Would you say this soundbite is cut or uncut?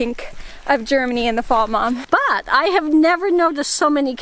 cut